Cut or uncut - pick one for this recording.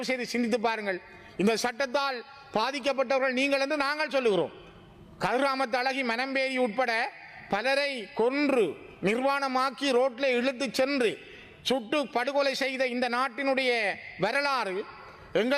uncut